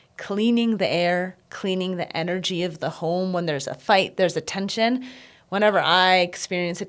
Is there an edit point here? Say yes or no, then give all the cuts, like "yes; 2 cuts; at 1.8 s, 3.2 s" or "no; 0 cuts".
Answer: no; 0 cuts